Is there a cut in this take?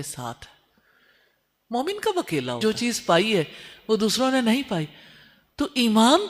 yes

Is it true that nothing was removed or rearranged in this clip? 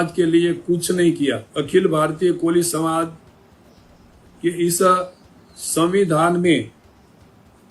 no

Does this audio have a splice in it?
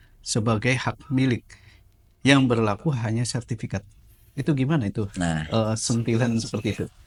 no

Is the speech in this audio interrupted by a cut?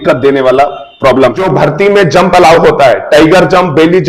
yes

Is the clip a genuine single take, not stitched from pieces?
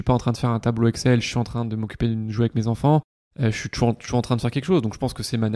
no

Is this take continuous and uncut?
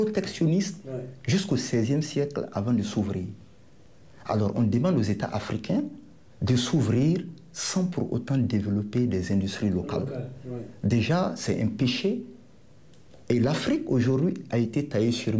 yes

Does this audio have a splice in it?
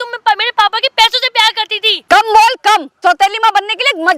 yes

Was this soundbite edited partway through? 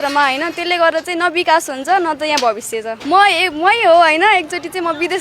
yes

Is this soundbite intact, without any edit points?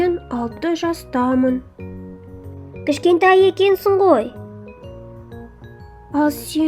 no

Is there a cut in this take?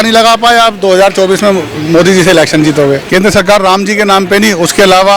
yes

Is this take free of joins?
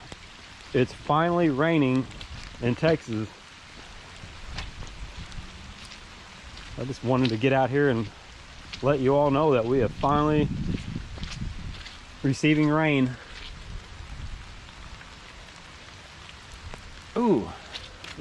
yes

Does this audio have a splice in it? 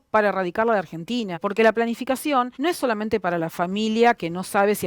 yes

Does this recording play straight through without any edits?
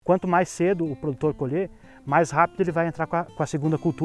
yes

